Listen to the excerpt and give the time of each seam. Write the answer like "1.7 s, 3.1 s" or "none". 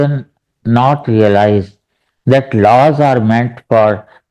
none